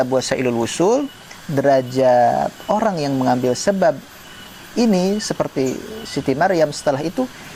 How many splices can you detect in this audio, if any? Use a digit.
0